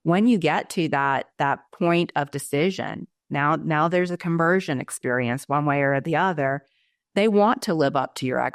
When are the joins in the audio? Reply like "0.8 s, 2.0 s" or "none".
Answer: none